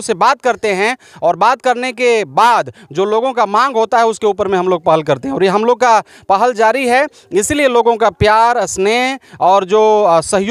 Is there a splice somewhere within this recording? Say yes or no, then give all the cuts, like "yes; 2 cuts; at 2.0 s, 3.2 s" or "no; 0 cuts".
no; 0 cuts